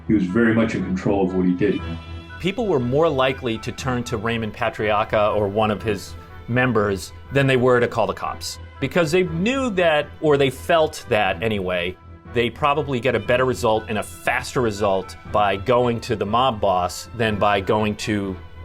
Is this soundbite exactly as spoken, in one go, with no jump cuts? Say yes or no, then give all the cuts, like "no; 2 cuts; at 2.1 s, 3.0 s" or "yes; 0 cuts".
no; 4 cuts; at 1.8 s, 8.8 s, 12.3 s, 15.2 s